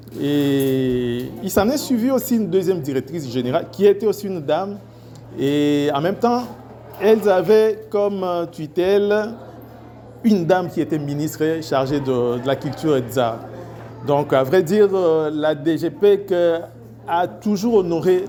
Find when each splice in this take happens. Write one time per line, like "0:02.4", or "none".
none

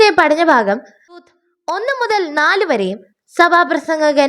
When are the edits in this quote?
0:01.2

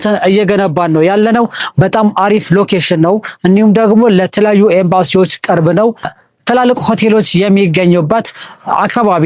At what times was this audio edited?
0:01.6
0:06.0

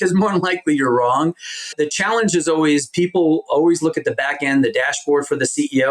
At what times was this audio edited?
0:01.7

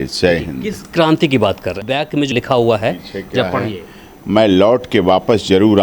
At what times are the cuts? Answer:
0:00.8
0:01.9

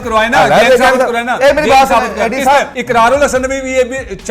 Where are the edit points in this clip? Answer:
0:02.7

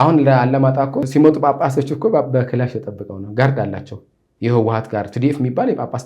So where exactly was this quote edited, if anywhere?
0:01.0

